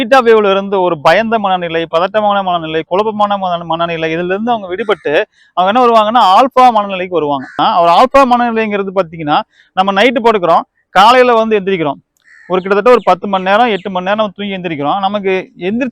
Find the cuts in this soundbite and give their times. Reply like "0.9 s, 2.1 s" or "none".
7.5 s